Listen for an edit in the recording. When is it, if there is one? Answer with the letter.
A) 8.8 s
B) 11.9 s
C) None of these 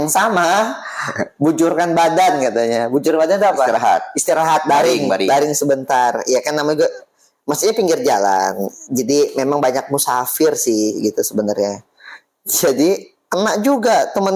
C